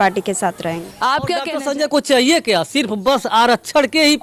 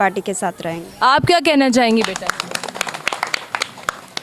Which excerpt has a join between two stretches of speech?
first; 1 cut; at 1.5 s

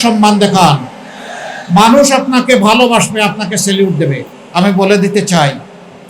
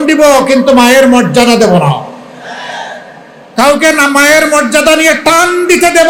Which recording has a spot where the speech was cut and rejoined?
first; 1 cut; at 4.3 s

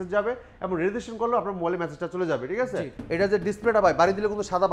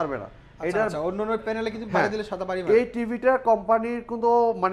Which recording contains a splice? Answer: first; 1 cut; at 2.9 s

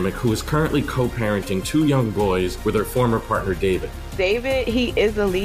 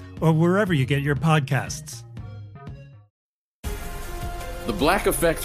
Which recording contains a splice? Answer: second; 1 cut; at 3.0 s

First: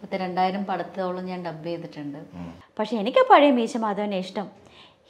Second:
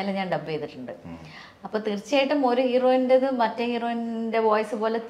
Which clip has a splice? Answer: first; 1 cut; at 2.6 s

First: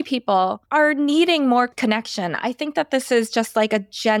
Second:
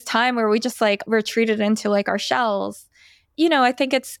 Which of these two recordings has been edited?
second; 2 cuts; at 1.0 s, 3.3 s

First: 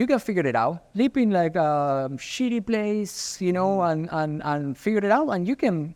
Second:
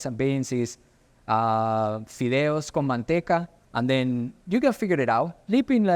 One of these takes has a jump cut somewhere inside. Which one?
second; 1 cut; at 3.6 s

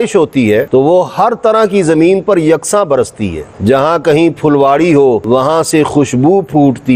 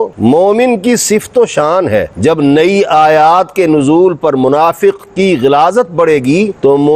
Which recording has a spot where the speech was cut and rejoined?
second; 1 cut; at 2.1 s

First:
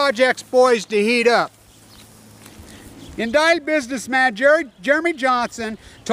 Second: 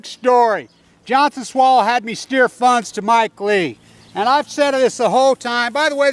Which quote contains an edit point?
first; 1 cut; at 1.9 s

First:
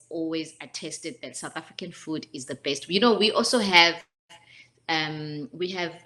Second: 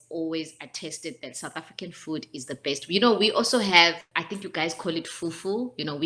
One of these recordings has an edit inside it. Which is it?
second; 1 cut; at 4.0 s

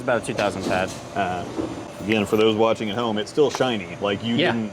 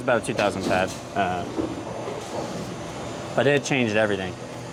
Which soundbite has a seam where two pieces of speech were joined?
first; 1 cut; at 1.9 s

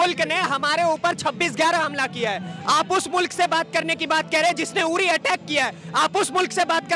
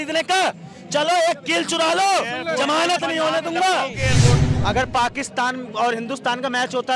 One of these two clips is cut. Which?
second; 1 cut; at 4.4 s

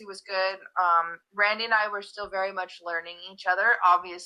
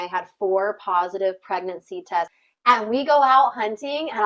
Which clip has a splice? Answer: second; 1 cut; at 2.4 s

